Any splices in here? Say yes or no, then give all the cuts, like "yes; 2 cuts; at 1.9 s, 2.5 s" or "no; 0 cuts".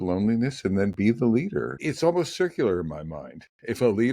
yes; 1 cut; at 1.8 s